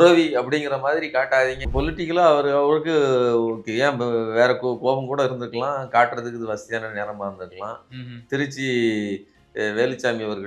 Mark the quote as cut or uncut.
cut